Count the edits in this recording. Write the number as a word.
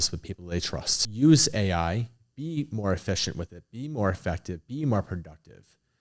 one